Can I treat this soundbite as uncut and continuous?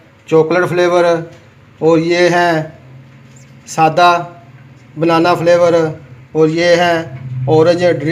yes; 0 cuts

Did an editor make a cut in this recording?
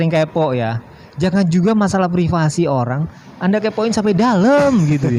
no; 0 cuts

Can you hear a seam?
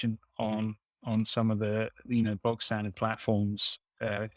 no; 0 cuts

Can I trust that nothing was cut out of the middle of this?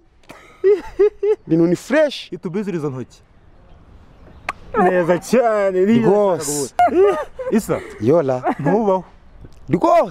yes; 0 cuts

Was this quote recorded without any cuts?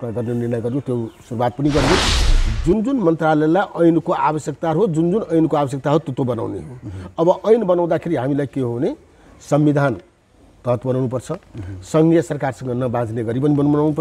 no; 1 cut; at 2.2 s

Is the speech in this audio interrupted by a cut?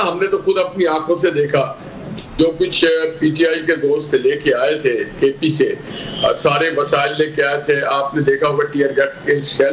no; 0 cuts

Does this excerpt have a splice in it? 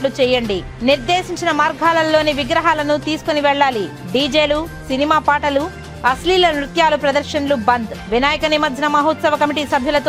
no; 0 cuts

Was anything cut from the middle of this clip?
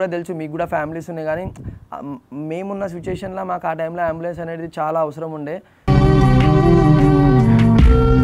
no; 0 cuts

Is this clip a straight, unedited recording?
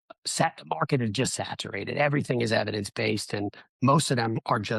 yes; 0 cuts

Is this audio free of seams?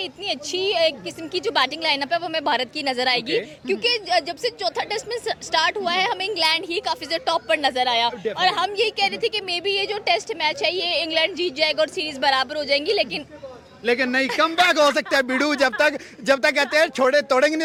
yes; 0 cuts

